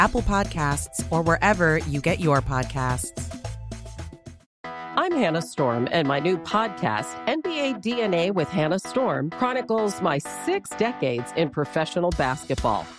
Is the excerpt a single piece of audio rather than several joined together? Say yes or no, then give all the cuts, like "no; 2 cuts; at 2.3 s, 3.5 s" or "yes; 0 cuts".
no; 1 cut; at 4.5 s